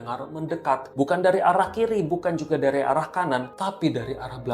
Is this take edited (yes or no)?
yes